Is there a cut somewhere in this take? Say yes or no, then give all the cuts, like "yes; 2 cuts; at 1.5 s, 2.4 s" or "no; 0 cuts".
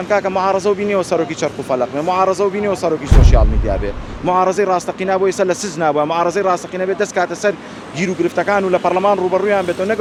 no; 0 cuts